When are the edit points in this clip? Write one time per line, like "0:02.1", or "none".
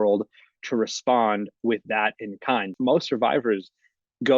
0:02.7